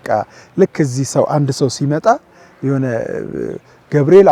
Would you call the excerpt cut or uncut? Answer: uncut